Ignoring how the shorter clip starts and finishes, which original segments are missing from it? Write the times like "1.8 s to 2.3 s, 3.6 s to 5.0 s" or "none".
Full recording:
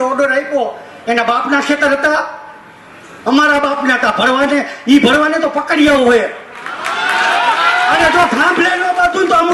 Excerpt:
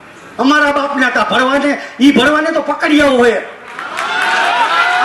none